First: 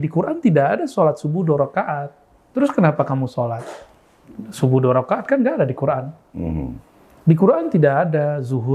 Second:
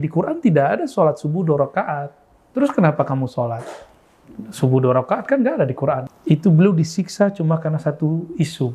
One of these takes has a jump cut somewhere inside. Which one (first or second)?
second